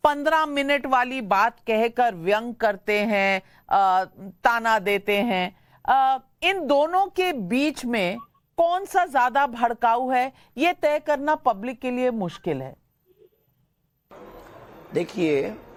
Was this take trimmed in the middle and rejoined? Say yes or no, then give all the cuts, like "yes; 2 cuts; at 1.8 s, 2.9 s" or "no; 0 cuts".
no; 0 cuts